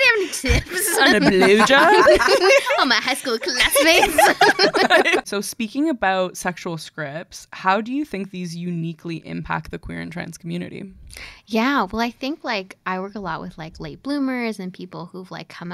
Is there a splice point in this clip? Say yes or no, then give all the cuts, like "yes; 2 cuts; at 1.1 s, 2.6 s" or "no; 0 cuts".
no; 0 cuts